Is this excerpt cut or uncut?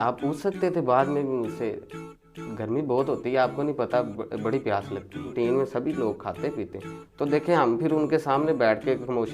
cut